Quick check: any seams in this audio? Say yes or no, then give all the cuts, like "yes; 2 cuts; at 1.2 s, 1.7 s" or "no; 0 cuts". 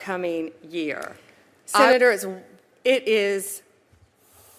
yes; 1 cut; at 1.8 s